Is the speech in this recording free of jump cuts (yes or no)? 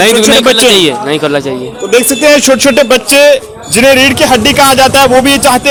yes